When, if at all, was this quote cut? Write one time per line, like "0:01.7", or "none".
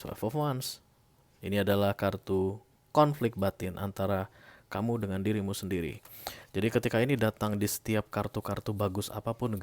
none